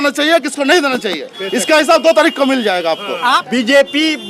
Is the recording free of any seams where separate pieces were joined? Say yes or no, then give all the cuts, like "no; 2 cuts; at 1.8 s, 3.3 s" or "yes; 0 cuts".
no; 1 cut; at 3.4 s